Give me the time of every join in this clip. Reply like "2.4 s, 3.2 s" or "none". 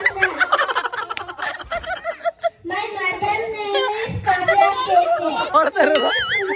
none